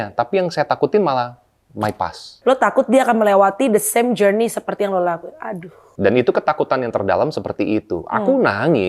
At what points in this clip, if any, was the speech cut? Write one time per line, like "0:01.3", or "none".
0:02.4
0:05.8